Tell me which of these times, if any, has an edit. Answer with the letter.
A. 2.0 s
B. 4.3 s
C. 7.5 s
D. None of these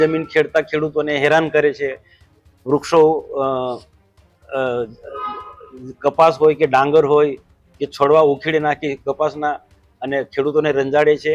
D